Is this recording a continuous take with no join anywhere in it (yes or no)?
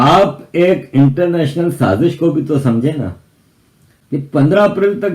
no